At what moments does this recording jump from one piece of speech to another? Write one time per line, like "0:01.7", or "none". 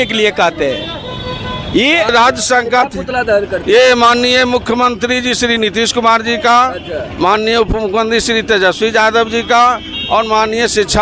0:02.1